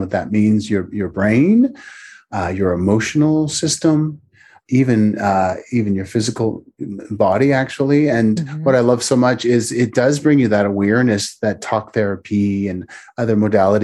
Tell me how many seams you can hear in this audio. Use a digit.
0